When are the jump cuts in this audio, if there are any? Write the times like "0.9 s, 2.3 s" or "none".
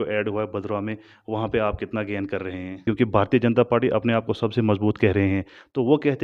2.7 s